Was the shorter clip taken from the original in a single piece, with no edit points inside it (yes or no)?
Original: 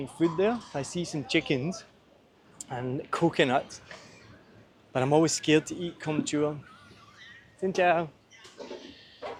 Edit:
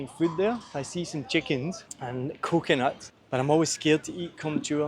no